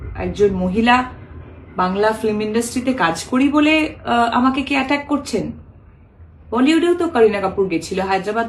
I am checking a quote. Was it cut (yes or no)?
no